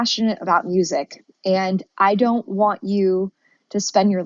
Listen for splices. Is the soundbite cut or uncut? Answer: uncut